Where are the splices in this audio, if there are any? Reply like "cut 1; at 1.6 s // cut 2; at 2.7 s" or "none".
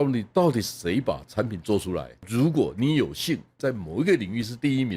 cut 1; at 2.2 s // cut 2; at 3.6 s